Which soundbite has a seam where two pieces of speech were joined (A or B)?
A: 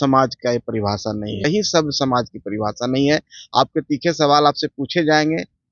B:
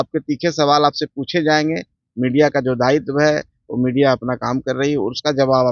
A